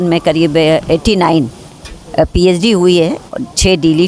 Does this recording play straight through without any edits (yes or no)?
yes